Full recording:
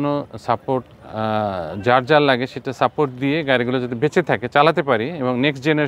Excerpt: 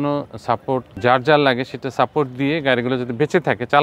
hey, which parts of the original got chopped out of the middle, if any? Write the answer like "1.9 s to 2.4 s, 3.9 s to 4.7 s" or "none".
0.9 s to 1.7 s